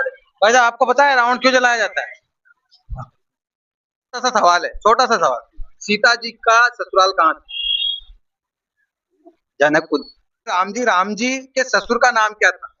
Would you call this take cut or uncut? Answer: cut